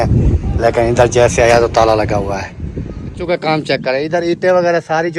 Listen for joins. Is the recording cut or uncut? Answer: cut